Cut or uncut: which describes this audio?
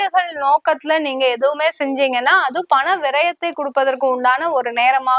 uncut